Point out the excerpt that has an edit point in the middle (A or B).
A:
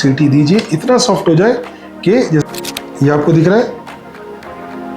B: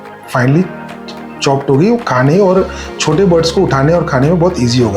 A